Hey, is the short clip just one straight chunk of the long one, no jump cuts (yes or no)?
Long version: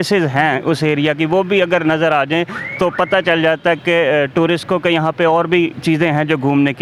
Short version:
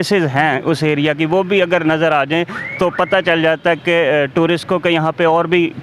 yes